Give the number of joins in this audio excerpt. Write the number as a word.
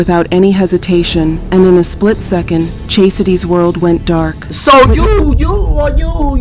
zero